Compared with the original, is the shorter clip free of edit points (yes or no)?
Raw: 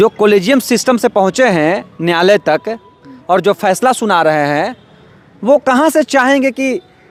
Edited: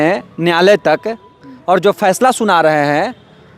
yes